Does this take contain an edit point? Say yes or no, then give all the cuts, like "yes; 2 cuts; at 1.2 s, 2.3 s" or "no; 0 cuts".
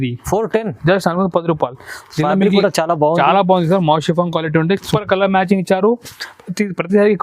yes; 1 cut; at 4.9 s